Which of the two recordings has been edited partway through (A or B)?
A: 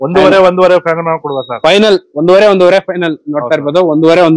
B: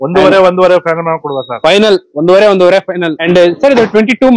B